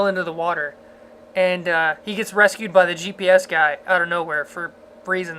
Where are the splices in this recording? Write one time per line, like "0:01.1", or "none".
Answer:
0:03.1